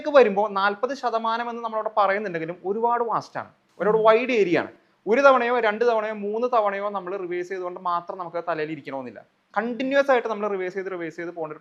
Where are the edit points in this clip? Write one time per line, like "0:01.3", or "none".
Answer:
none